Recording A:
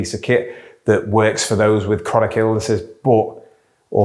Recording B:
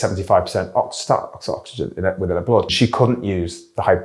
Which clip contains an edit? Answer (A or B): B